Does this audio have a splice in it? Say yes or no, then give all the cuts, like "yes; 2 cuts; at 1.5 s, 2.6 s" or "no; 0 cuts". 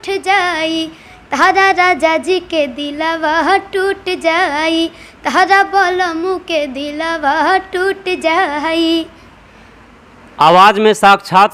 no; 0 cuts